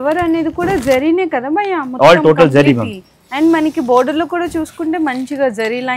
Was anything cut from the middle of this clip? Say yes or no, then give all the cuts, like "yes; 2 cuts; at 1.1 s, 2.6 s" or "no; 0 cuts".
no; 0 cuts